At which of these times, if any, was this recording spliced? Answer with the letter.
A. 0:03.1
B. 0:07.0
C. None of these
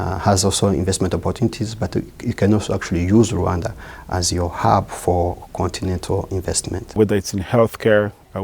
B